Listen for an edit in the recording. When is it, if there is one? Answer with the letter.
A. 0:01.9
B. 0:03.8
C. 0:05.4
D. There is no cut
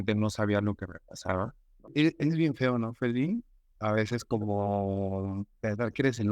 A